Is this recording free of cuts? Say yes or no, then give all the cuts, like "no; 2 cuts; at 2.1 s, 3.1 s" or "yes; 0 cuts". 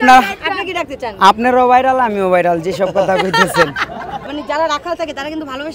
no; 1 cut; at 4.2 s